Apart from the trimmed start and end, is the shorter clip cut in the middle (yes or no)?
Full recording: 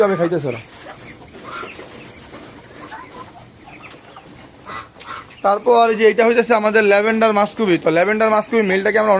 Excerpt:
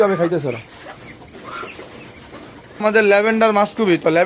yes